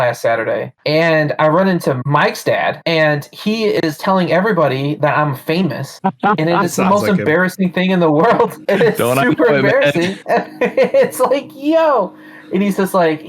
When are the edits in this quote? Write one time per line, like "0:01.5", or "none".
0:00.8
0:08.6